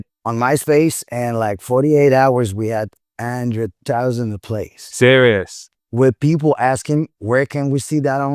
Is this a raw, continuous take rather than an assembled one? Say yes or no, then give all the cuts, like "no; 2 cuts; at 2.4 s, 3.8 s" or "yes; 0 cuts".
yes; 0 cuts